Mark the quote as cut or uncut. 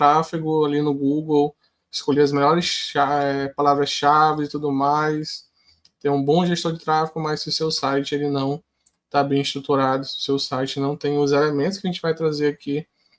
uncut